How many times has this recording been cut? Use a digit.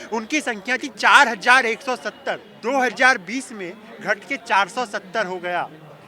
1